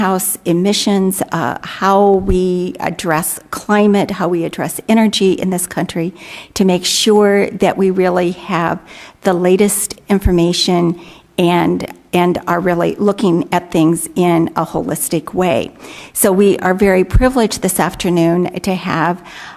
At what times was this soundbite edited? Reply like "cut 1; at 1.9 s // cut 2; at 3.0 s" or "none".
none